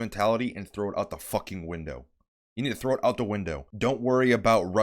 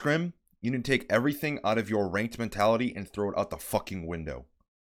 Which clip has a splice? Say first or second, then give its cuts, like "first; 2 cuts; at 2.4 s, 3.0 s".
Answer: first; 1 cut; at 3.6 s